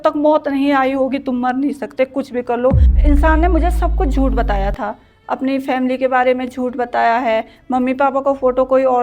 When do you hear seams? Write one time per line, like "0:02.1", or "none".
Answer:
0:02.9